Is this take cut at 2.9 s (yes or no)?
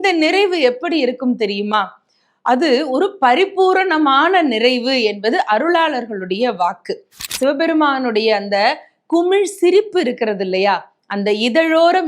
no